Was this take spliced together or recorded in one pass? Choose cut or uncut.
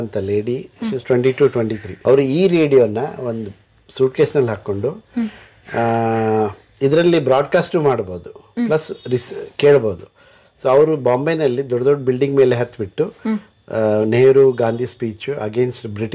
cut